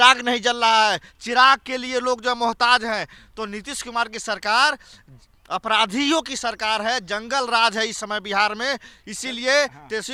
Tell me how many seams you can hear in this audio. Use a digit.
0